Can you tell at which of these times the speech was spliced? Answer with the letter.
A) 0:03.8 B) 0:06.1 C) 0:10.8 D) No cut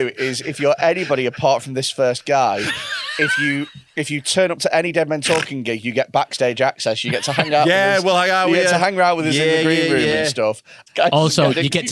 C